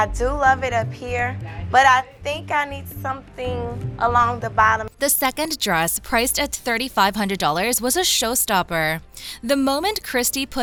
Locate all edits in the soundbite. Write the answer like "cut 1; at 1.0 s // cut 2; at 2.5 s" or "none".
none